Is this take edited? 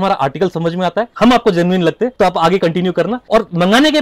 yes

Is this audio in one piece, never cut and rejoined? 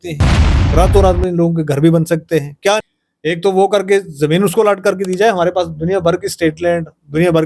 no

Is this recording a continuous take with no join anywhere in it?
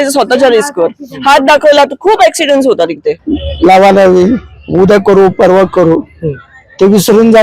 no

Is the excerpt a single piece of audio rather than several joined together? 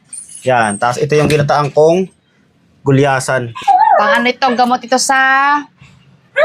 no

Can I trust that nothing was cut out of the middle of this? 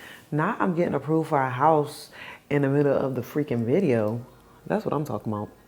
yes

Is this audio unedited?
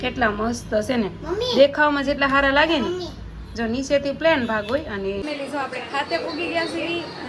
no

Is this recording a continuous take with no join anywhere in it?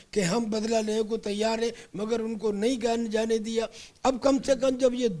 yes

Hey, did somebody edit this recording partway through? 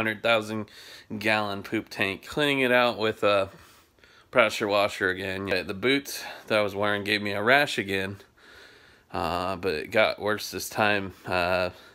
yes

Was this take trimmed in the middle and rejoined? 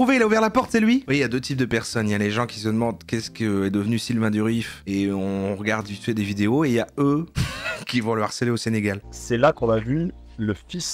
yes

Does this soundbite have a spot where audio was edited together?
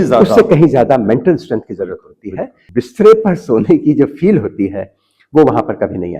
yes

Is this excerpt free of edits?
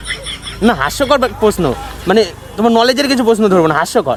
yes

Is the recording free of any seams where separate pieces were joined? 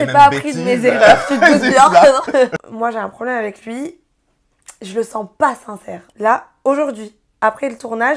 no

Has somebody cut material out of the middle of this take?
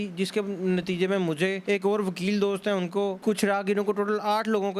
yes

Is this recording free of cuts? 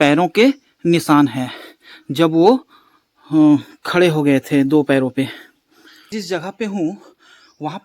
no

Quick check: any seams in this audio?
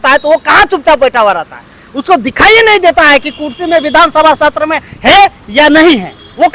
no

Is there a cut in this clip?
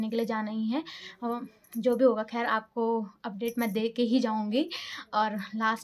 no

